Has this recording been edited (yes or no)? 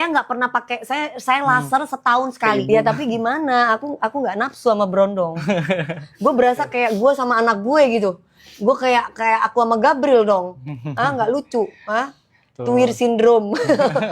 yes